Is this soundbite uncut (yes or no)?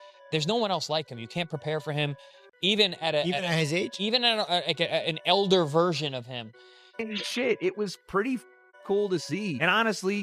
no